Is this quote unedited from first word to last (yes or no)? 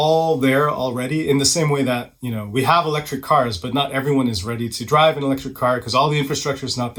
yes